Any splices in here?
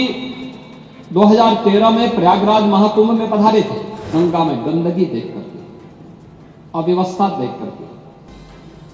yes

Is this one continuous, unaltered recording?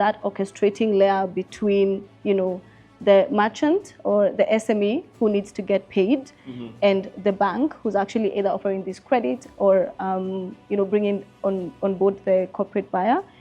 yes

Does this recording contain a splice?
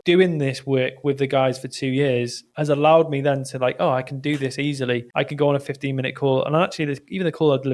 no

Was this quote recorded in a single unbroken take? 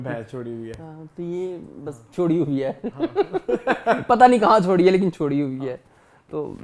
yes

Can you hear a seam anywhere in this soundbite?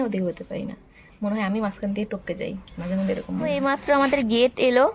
yes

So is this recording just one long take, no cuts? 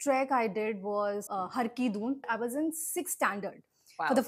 no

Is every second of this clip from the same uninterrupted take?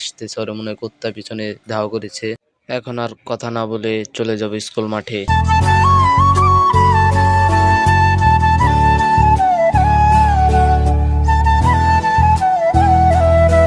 yes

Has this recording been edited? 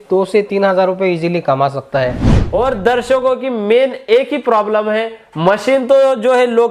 yes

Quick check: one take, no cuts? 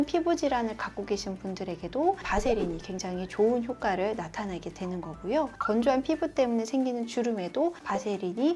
yes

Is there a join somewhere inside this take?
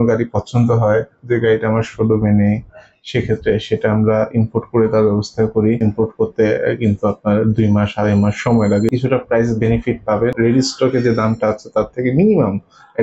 yes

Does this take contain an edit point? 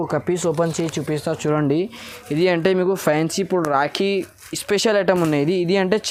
no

